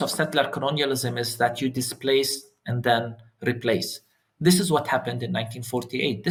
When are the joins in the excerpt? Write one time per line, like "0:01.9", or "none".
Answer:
none